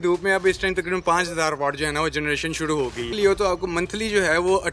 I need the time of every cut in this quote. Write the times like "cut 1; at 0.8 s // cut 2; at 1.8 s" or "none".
cut 1; at 3.1 s

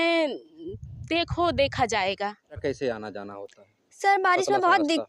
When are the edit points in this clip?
cut 1; at 2.6 s

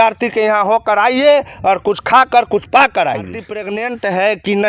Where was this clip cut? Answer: cut 1; at 3.4 s

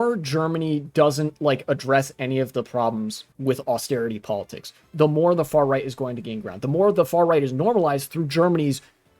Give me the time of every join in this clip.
cut 1; at 3.2 s

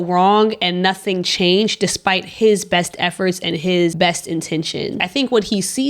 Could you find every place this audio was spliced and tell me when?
cut 1; at 3.9 s // cut 2; at 5.1 s

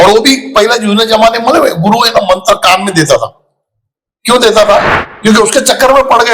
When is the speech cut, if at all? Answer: cut 1; at 4.9 s

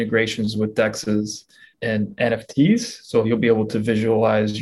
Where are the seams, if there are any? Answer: cut 1; at 1.7 s

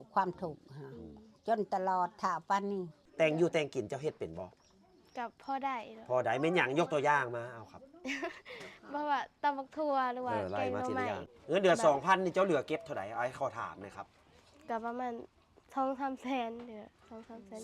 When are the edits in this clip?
cut 1; at 3.0 s // cut 2; at 11.3 s

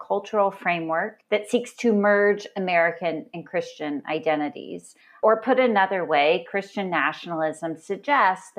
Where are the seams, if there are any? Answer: none

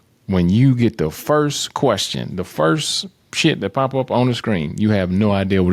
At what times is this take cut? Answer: none

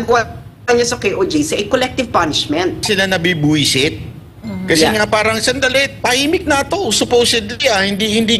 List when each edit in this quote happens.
cut 1; at 2.8 s

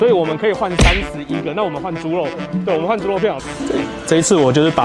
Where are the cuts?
cut 1; at 3.4 s

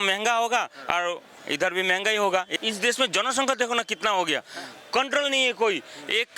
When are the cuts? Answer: cut 1; at 2.5 s

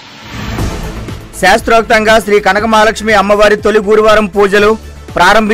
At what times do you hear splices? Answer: cut 1; at 0.9 s

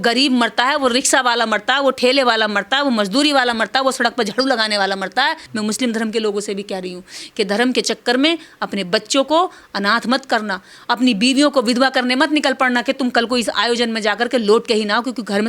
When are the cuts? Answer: cut 1; at 5.5 s

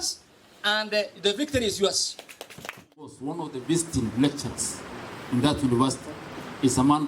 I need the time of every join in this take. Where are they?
cut 1; at 3.3 s

